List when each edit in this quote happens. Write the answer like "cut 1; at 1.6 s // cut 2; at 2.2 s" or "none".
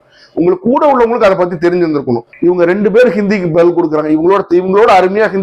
cut 1; at 2.3 s